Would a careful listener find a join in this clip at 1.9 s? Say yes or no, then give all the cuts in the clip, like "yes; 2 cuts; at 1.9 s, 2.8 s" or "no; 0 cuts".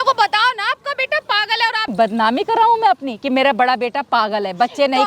yes; 1 cut; at 1.9 s